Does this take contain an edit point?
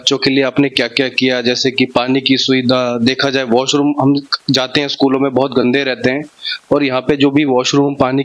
no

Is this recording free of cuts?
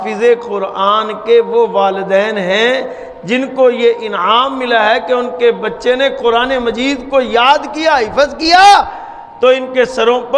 yes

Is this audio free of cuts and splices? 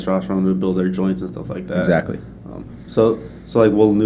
yes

